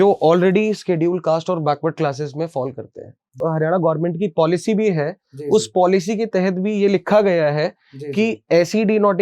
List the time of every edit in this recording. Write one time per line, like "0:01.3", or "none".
0:03.4